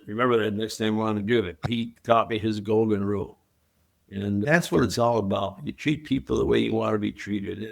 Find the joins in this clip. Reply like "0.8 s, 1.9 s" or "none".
1.7 s, 4.4 s